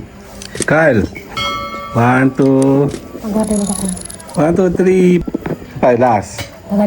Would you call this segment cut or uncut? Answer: cut